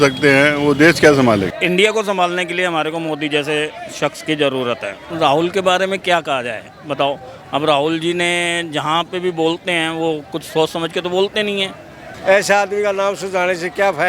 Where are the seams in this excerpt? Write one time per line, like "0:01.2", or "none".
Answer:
0:01.5
0:05.0
0:12.1